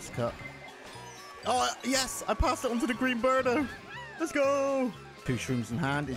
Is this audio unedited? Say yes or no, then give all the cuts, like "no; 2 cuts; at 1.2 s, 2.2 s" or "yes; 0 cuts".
no; 1 cut; at 5.1 s